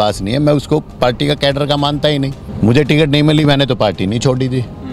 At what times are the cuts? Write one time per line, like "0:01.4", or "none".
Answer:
0:02.4